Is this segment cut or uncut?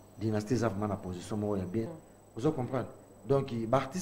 cut